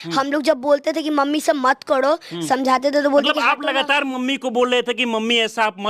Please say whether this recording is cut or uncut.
uncut